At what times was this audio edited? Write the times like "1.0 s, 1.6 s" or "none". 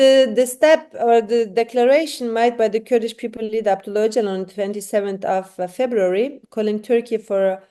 none